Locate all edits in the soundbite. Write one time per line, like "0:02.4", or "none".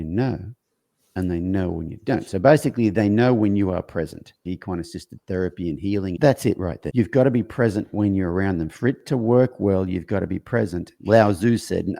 0:04.5
0:06.2
0:06.8
0:10.9